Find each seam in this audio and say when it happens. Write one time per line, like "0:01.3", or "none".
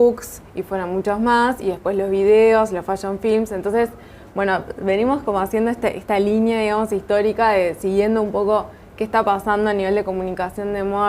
none